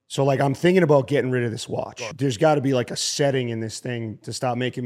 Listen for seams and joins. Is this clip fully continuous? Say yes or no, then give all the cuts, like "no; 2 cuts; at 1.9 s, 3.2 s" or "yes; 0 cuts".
no; 1 cut; at 2.0 s